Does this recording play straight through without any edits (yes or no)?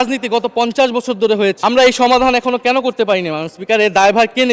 no